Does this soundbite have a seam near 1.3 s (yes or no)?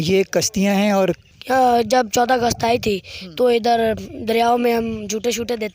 yes